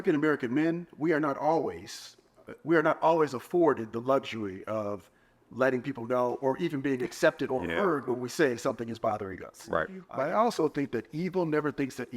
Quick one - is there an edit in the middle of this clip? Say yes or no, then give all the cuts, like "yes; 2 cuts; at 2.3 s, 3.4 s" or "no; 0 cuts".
yes; 1 cut; at 10.0 s